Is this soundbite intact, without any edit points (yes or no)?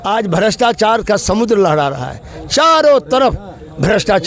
yes